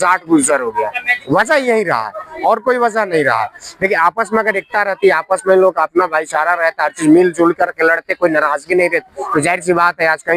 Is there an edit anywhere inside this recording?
no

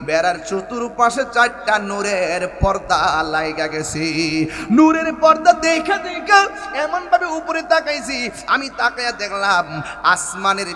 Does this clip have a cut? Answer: no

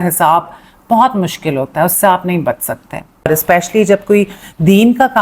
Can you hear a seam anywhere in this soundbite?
yes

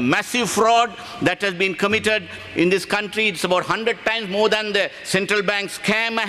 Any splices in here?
no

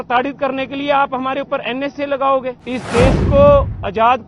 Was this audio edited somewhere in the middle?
yes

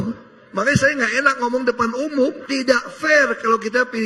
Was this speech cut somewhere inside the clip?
no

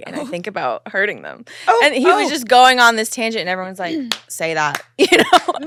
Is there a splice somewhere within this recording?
no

